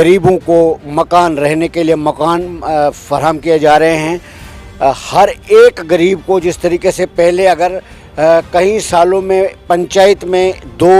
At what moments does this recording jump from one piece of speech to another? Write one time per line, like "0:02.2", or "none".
none

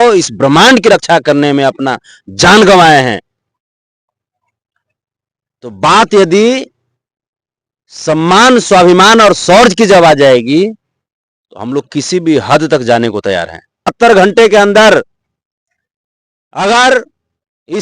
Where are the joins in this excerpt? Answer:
0:13.9

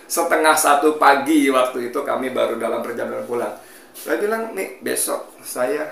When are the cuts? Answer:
none

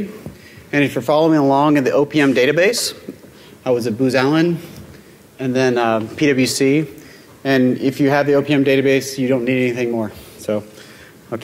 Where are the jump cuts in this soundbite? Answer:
0:06.4

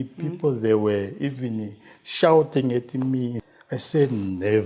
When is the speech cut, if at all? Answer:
0:03.4

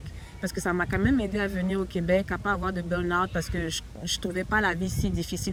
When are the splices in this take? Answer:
none

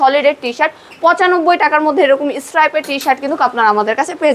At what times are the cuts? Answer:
none

